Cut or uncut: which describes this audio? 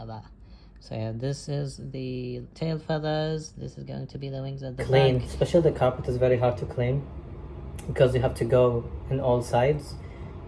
cut